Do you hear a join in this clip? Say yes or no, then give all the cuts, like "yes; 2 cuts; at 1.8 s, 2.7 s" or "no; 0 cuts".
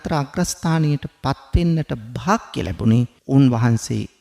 yes; 1 cut; at 3.2 s